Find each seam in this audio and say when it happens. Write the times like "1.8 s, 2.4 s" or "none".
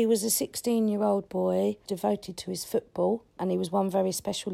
1.9 s, 3.4 s